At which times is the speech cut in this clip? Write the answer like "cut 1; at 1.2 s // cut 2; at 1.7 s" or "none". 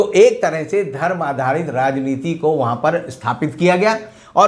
none